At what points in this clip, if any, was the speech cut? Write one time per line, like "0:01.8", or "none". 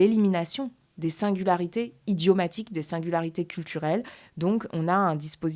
0:04.2